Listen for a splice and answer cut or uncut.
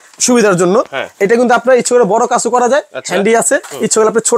uncut